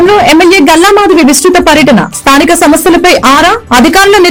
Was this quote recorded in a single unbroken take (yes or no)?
yes